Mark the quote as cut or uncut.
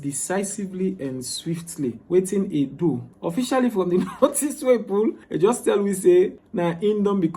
cut